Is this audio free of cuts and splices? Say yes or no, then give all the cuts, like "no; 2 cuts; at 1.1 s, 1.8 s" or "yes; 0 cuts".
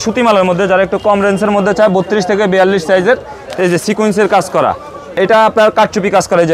no; 1 cut; at 5.1 s